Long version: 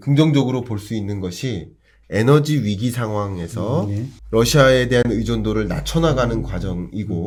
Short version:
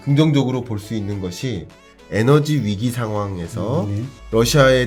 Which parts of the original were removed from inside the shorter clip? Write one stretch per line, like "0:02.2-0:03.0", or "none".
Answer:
none